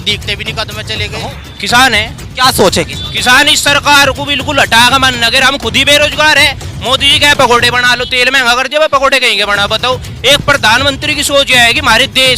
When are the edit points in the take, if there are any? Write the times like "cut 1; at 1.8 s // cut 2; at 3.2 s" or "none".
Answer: cut 1; at 1.4 s